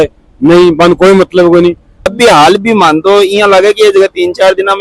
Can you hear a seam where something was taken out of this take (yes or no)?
yes